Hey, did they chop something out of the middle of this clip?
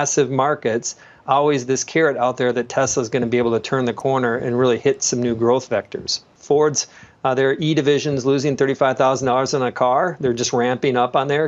yes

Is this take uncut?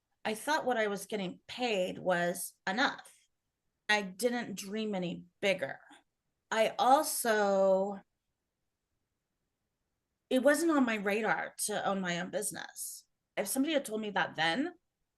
no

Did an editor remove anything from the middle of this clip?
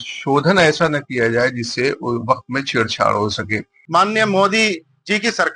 yes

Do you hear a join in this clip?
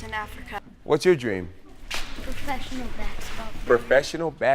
yes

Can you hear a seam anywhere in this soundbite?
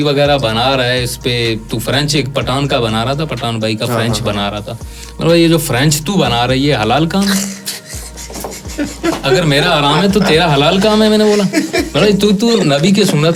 no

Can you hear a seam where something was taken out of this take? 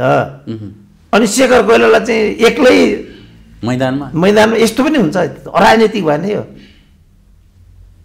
no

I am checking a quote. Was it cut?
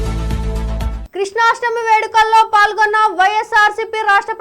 yes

